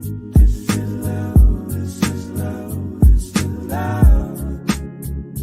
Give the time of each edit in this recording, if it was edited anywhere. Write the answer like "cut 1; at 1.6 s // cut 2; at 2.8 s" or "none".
none